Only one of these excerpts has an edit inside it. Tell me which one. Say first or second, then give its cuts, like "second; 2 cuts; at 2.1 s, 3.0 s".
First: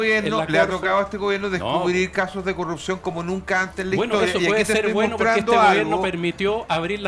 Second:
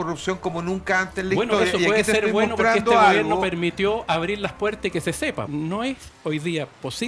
second; 1 cut; at 5.5 s